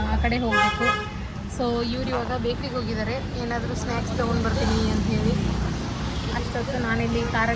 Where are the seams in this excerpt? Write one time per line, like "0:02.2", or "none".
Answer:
none